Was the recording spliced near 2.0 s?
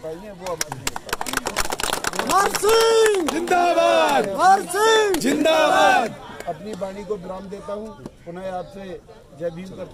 no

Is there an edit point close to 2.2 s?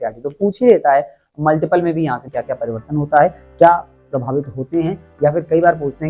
yes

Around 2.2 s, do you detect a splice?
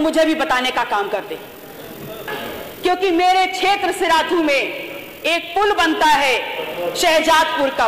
yes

